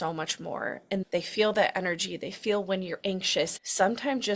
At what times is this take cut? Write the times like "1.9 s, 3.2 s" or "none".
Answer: 1.0 s, 3.5 s